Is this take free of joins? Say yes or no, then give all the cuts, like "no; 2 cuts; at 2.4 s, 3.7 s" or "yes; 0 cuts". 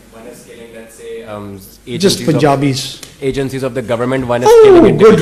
yes; 0 cuts